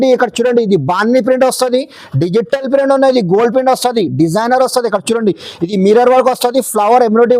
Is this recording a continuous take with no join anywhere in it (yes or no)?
yes